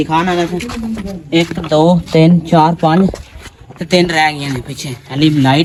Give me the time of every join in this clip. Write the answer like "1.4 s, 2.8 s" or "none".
none